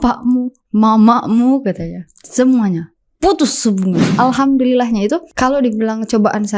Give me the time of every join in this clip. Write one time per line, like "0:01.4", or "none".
0:04.1
0:05.3